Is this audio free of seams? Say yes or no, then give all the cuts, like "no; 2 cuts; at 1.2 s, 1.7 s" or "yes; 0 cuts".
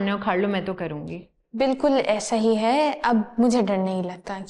yes; 0 cuts